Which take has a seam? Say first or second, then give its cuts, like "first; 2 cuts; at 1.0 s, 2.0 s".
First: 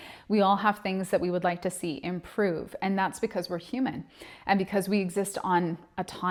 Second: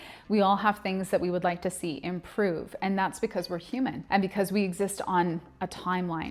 second; 1 cut; at 4.0 s